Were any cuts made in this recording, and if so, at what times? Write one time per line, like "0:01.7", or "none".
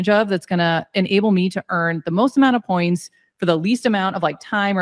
none